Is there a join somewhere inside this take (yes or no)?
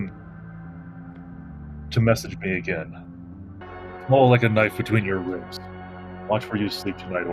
yes